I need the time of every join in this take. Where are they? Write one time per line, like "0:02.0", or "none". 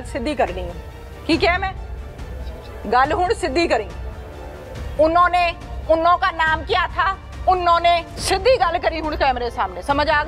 0:08.1